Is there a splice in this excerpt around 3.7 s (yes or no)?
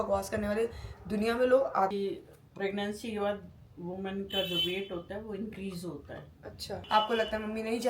no